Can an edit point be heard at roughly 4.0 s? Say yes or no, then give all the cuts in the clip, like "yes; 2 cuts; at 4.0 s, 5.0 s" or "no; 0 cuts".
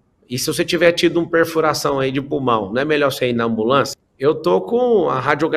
yes; 1 cut; at 4.0 s